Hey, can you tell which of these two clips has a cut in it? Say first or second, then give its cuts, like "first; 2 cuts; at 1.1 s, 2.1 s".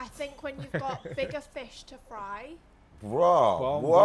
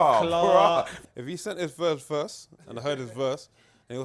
second; 1 cut; at 1.0 s